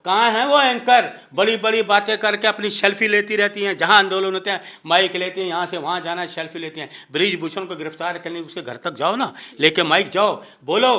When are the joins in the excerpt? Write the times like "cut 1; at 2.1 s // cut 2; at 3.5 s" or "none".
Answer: none